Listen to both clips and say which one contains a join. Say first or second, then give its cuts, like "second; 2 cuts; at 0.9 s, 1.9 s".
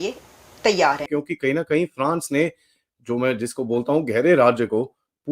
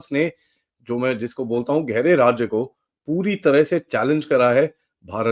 first; 1 cut; at 1.1 s